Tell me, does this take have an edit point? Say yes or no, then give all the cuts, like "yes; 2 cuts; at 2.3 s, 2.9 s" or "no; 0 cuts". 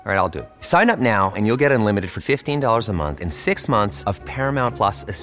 no; 0 cuts